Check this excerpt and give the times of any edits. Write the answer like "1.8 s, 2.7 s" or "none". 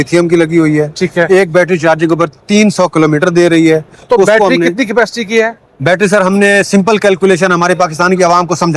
none